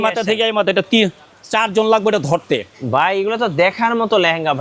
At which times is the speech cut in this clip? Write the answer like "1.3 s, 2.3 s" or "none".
2.7 s

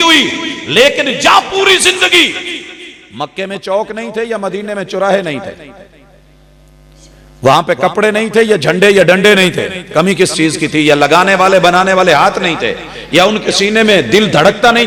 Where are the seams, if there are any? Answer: none

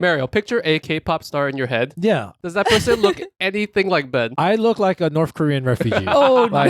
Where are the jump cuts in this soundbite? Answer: none

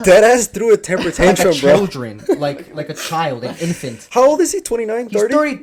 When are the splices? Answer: none

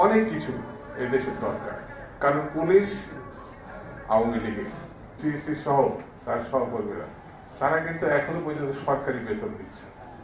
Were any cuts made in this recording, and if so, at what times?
5.2 s

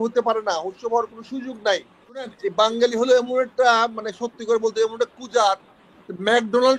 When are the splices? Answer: 2.4 s

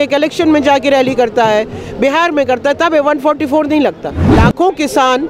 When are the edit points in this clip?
4.2 s

